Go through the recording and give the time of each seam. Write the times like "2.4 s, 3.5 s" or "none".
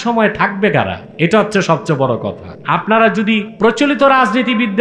1.0 s, 2.5 s, 3.5 s